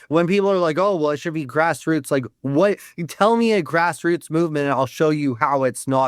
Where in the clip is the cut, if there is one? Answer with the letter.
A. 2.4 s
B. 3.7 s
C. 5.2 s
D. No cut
D